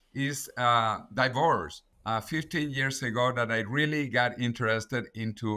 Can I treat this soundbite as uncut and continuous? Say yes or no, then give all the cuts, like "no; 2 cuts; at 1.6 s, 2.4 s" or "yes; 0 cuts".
no; 1 cut; at 1.8 s